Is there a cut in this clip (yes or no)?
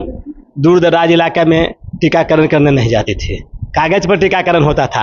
no